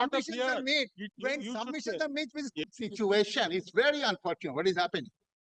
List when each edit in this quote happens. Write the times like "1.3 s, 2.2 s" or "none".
2.6 s